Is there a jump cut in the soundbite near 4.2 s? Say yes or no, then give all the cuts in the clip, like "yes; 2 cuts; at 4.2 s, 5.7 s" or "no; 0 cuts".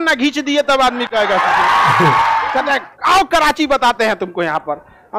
no; 1 cut; at 2.4 s